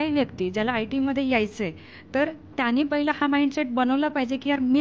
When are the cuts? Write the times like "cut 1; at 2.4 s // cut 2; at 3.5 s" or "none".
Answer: none